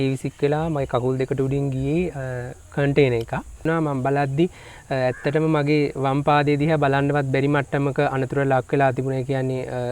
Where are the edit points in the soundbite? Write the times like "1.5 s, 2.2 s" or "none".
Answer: 3.6 s